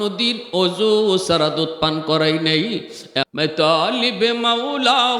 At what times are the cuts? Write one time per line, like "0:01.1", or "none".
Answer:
0:03.3